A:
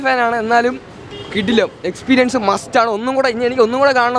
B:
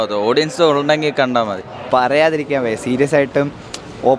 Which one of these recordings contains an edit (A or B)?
B